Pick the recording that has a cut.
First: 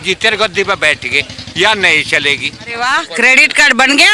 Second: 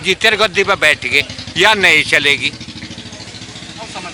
first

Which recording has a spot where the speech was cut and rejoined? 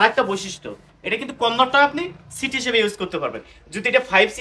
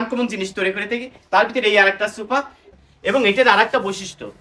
second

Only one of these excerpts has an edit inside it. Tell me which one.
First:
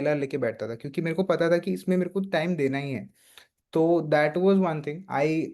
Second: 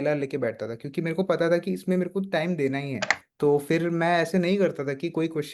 second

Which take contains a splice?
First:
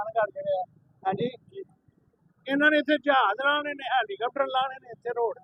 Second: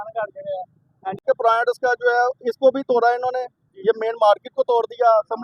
second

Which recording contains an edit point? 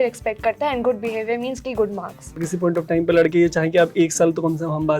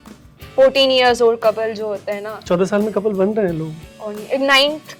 first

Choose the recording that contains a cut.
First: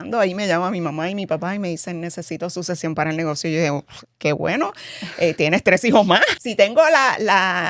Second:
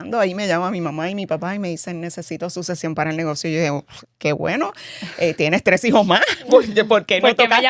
first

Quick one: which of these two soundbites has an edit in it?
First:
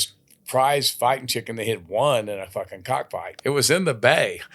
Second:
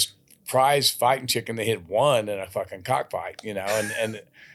first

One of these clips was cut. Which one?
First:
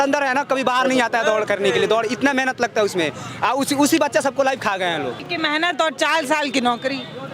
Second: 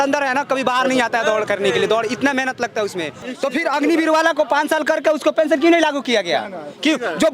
second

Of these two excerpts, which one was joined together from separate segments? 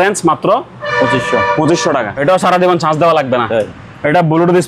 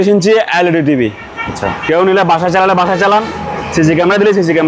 first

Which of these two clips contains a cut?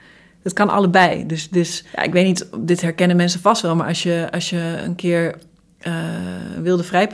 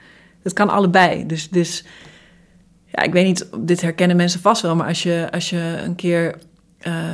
first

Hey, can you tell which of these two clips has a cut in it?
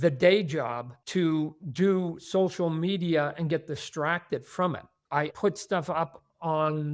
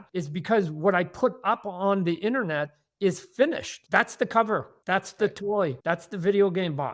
first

